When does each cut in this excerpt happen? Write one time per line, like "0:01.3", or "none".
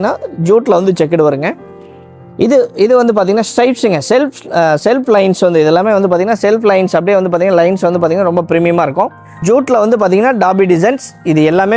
0:09.3